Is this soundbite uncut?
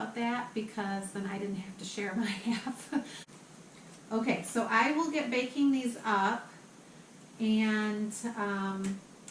no; 1 cut; at 3.2 s

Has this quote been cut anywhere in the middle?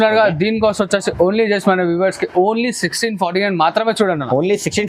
no; 0 cuts

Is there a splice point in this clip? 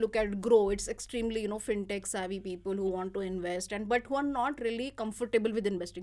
no; 0 cuts

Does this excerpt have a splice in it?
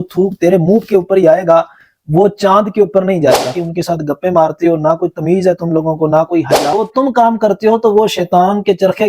yes; 2 cuts; at 3.5 s, 6.7 s

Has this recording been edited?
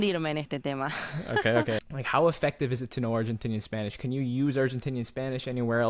yes; 1 cut; at 1.9 s

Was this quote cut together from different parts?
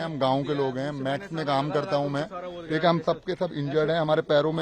no; 0 cuts

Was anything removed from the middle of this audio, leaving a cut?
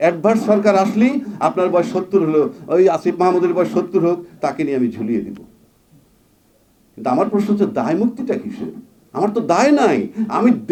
no; 0 cuts

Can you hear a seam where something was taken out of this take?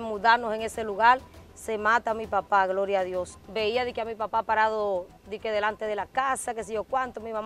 yes; 1 cut; at 3.4 s

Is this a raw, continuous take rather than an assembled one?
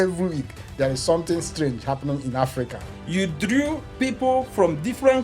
no; 1 cut; at 2.9 s

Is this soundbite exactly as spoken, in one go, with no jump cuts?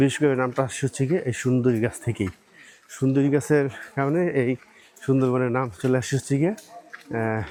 yes; 0 cuts

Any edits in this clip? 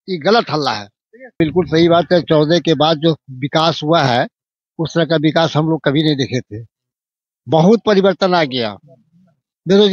yes; 1 cut; at 1.4 s

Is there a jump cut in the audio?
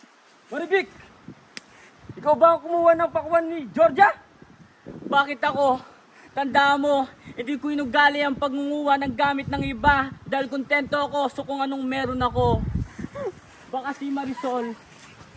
no; 0 cuts

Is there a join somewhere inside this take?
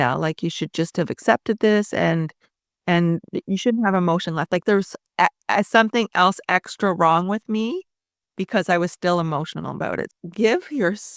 yes; 1 cut; at 10.0 s

